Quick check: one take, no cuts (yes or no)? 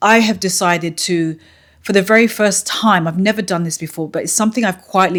yes